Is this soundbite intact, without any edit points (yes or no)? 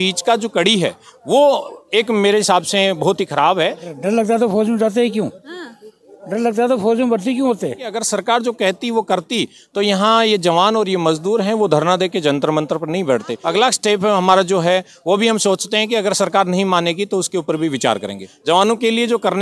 no